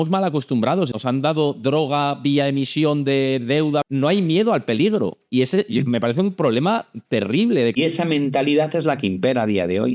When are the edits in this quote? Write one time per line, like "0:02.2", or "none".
0:01.0
0:03.9
0:07.8